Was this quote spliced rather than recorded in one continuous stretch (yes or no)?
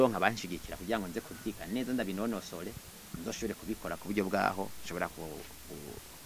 no